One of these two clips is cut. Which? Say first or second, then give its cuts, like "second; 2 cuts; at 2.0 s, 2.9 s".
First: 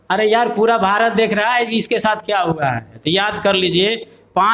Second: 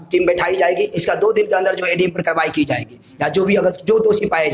first; 1 cut; at 2.9 s